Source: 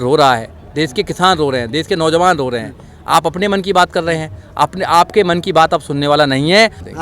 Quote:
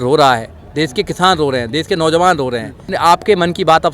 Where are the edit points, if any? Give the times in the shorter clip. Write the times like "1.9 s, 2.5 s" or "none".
2.9 s